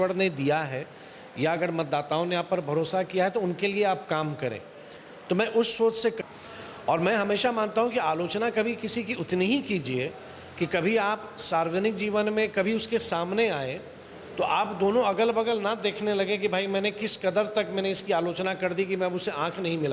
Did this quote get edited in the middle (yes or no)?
yes